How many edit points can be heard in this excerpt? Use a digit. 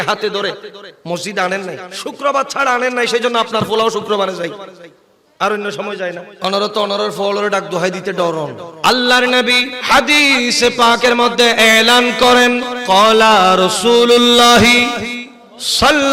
5